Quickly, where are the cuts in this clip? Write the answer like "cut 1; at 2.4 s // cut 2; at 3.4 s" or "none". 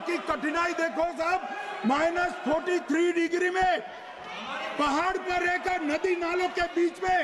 none